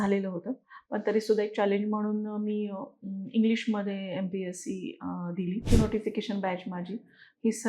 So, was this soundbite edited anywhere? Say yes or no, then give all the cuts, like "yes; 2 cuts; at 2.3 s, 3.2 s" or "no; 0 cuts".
yes; 1 cut; at 5.7 s